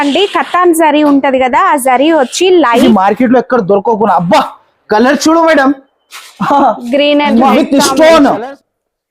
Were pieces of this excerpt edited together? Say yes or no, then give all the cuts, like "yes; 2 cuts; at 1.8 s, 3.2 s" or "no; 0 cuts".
yes; 2 cuts; at 2.8 s, 7.5 s